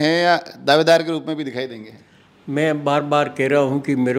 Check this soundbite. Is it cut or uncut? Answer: uncut